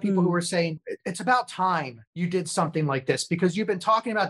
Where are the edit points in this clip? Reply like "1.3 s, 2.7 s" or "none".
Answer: 2.0 s